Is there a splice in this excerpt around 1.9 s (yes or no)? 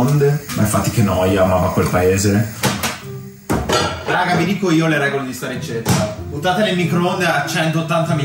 no